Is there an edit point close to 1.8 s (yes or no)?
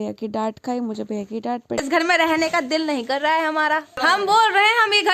yes